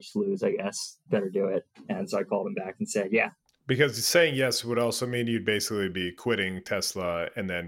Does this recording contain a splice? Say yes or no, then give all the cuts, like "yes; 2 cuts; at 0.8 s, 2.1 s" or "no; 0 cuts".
yes; 1 cut; at 1.0 s